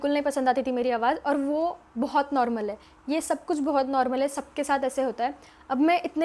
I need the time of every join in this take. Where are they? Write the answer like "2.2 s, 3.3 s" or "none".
none